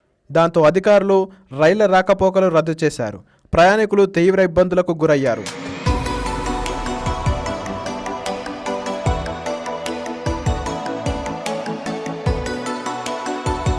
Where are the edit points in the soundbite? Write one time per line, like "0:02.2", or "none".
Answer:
0:05.5